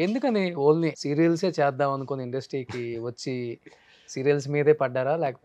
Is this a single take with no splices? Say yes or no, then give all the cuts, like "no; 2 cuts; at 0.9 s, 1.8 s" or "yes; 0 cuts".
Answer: no; 1 cut; at 1.0 s